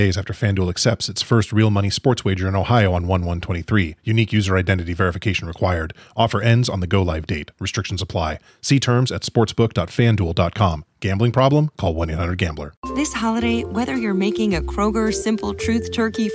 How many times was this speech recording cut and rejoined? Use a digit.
1